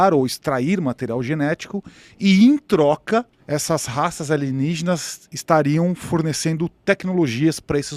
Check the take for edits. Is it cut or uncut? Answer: uncut